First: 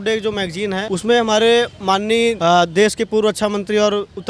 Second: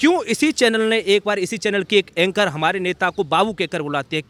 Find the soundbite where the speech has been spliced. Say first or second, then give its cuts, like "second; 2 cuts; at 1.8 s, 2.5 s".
first; 2 cuts; at 0.8 s, 2.4 s